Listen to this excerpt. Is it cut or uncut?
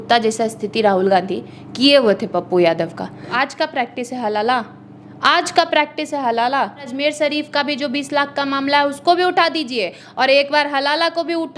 cut